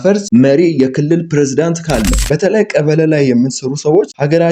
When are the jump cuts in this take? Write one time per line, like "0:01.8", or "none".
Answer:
0:02.2